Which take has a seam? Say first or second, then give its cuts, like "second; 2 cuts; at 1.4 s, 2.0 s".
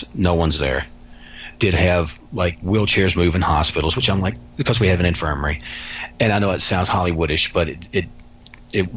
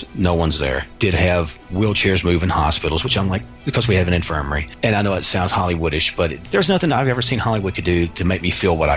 second; 4 cuts; at 0.9 s, 1.7 s, 4.6 s, 6.4 s